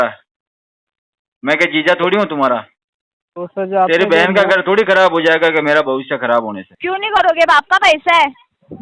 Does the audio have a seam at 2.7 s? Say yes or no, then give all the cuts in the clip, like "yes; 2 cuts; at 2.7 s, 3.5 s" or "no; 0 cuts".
no; 1 cut; at 6.6 s